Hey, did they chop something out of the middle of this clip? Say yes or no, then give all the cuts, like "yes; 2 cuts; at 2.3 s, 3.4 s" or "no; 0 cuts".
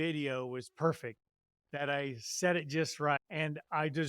yes; 1 cut; at 3.2 s